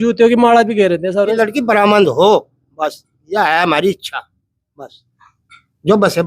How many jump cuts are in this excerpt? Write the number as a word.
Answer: one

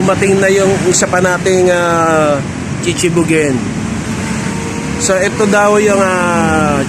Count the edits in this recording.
zero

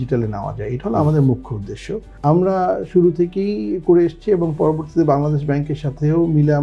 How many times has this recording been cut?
zero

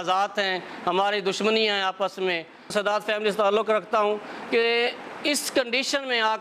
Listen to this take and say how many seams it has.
one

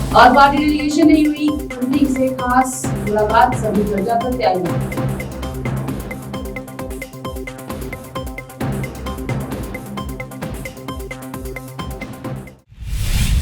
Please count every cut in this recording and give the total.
one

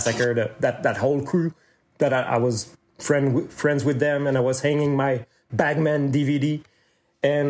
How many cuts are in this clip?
zero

